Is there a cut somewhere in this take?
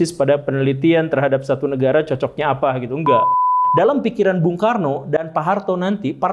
yes; 1 cut; at 3.6 s

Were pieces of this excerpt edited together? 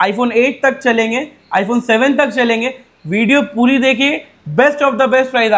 no; 0 cuts

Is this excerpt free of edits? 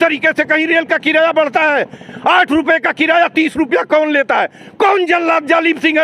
yes; 0 cuts

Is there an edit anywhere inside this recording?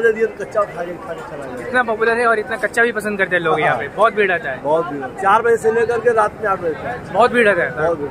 yes; 1 cut; at 5.1 s

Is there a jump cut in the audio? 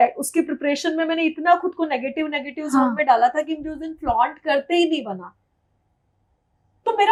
no; 0 cuts

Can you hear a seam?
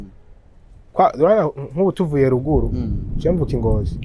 no; 0 cuts

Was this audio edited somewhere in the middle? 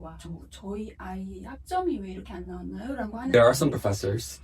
yes; 1 cut; at 3.3 s

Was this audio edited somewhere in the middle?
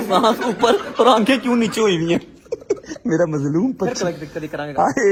no; 0 cuts

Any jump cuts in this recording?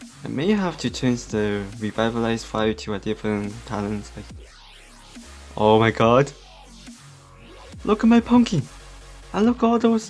no; 0 cuts

